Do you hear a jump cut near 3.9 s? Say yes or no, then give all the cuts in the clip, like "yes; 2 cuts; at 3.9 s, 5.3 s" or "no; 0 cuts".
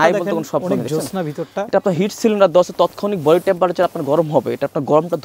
no; 0 cuts